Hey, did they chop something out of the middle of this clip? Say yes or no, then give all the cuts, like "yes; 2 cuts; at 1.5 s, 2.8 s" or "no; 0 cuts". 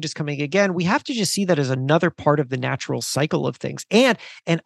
no; 0 cuts